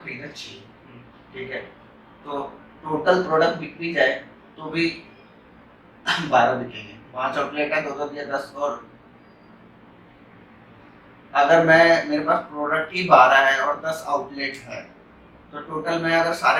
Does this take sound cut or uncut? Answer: uncut